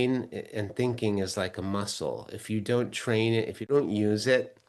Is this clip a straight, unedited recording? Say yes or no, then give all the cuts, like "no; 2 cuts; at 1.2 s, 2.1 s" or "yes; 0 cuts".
no; 1 cut; at 3.7 s